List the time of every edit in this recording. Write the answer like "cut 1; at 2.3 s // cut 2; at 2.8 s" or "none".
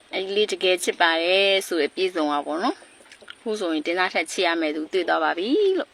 none